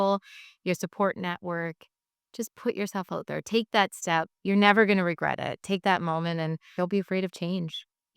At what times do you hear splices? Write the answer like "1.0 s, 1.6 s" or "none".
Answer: 4.3 s, 5.6 s, 6.6 s